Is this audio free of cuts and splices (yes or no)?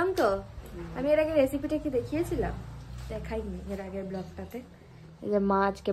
yes